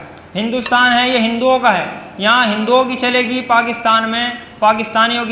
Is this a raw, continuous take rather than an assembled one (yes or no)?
yes